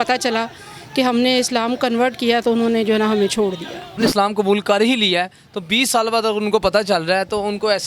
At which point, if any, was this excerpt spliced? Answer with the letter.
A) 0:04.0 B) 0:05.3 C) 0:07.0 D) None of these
A